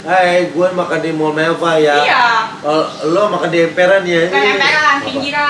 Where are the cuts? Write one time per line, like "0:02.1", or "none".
none